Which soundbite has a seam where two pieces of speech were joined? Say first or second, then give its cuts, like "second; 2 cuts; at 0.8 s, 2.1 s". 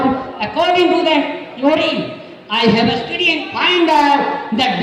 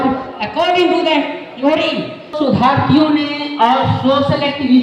second; 1 cut; at 2.3 s